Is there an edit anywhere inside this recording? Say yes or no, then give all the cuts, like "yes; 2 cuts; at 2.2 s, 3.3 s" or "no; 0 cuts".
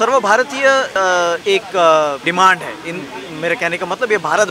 yes; 2 cuts; at 0.9 s, 2.2 s